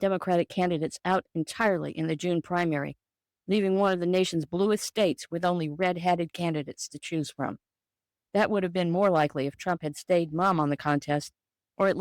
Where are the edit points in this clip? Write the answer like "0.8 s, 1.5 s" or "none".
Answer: 6.3 s, 10.3 s